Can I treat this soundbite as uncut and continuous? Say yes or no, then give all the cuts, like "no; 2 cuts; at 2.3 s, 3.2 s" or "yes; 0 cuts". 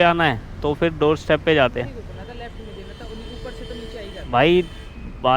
yes; 0 cuts